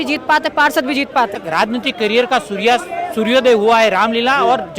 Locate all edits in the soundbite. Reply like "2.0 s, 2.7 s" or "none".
1.4 s